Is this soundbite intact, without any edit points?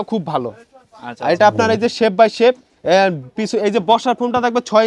yes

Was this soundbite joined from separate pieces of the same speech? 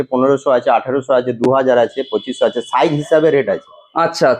no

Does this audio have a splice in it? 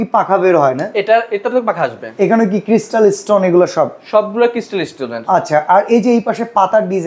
no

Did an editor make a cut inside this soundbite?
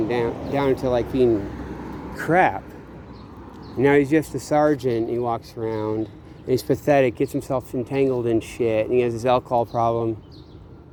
no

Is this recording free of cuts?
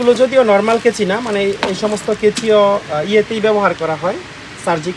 yes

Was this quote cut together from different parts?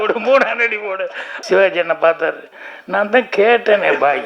yes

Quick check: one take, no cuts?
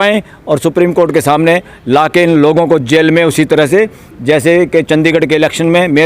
yes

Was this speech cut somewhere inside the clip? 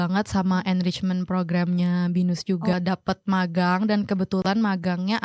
yes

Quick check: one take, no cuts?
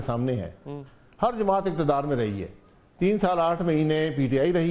yes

